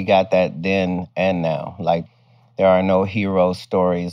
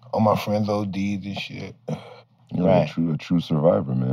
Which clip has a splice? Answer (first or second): first